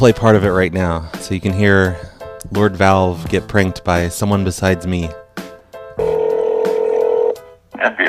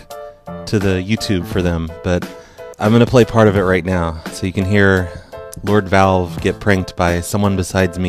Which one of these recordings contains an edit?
second; 1 cut; at 1.2 s

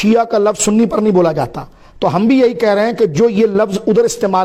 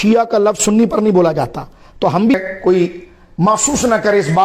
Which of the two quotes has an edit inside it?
second; 1 cut; at 2.3 s

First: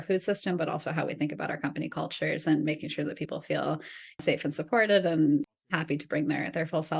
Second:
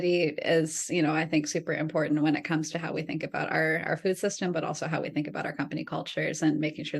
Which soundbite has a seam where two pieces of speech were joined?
first; 2 cuts; at 4.2 s, 5.4 s

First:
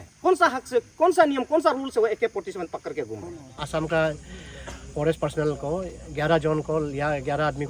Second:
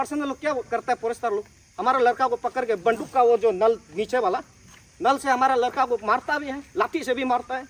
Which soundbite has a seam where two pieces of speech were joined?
first; 1 cut; at 3.6 s

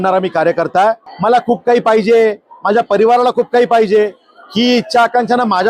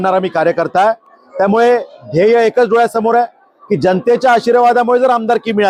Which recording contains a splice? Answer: first; 1 cut; at 1.1 s

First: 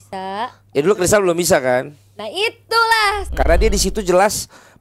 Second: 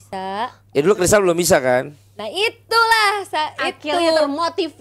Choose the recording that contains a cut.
first; 1 cut; at 3.2 s

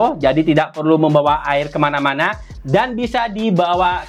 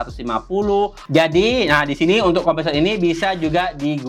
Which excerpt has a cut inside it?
second; 1 cut; at 1.0 s

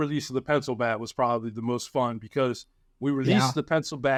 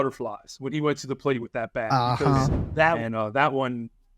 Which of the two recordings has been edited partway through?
second; 1 cut; at 3.0 s

